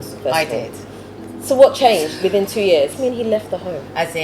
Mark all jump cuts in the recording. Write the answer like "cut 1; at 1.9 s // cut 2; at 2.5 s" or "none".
cut 1; at 2.9 s

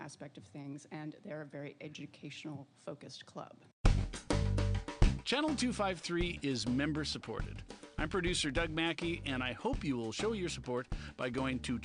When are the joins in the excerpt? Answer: cut 1; at 3.8 s

